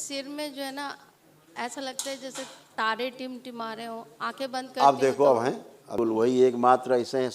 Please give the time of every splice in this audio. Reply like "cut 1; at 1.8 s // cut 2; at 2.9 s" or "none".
cut 1; at 5.9 s